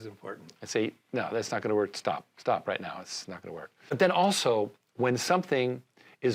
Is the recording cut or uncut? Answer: cut